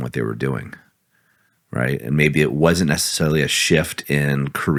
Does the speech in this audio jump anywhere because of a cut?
no; 0 cuts

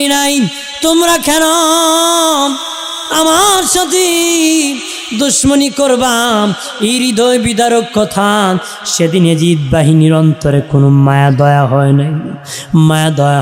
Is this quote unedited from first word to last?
yes; 0 cuts

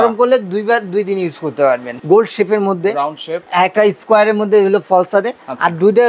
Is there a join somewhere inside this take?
yes; 1 cut; at 1.9 s

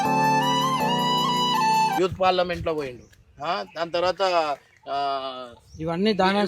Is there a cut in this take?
no; 0 cuts

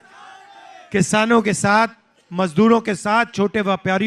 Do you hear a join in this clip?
no; 0 cuts

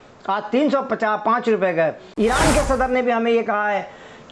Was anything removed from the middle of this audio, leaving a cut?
yes; 1 cut; at 2.0 s

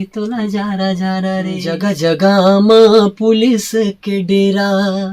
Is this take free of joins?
no; 1 cut; at 1.6 s

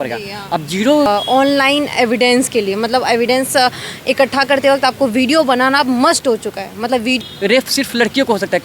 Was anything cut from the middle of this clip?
yes; 2 cuts; at 1.1 s, 7.2 s

